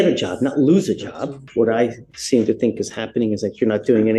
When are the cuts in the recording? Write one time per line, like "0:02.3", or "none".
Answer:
0:01.4